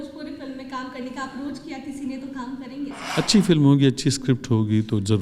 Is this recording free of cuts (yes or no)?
yes